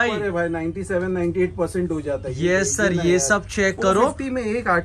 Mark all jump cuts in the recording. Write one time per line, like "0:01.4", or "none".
none